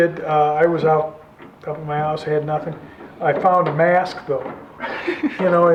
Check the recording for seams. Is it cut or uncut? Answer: uncut